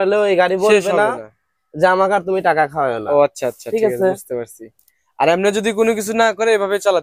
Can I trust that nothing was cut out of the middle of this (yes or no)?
yes